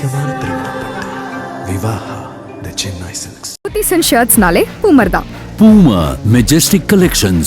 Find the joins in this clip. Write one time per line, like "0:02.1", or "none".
0:03.7